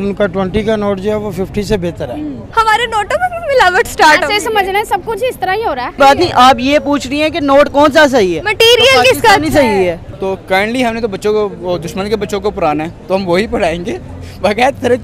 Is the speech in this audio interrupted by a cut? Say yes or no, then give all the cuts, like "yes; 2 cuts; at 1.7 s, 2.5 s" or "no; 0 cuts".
yes; 3 cuts; at 2.4 s, 5.9 s, 10.1 s